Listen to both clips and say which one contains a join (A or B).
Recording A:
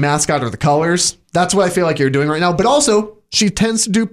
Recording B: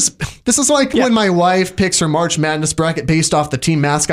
B